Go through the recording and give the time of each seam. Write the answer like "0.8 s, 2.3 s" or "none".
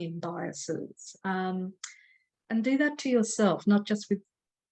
none